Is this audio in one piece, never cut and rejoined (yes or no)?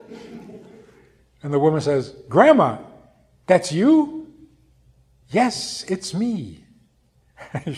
yes